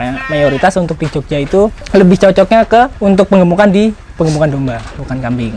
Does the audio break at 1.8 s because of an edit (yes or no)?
yes